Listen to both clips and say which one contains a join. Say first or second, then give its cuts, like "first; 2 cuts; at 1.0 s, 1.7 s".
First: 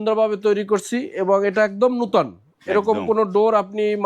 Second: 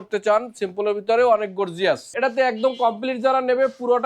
second; 1 cut; at 2.1 s